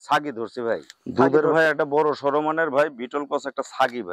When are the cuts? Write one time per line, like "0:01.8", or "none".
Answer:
0:01.0